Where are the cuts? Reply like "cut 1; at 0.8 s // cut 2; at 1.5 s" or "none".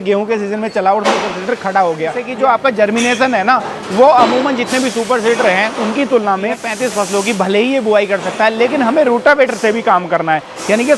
cut 1; at 2.2 s // cut 2; at 6.7 s